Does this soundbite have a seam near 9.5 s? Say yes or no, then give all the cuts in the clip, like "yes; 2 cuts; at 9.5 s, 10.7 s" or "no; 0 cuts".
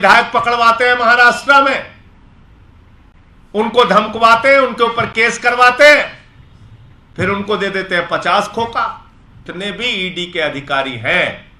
yes; 1 cut; at 9.5 s